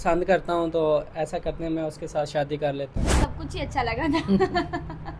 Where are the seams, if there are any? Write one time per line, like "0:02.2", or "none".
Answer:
0:03.3